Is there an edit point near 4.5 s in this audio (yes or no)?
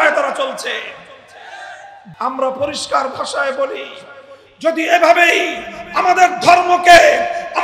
no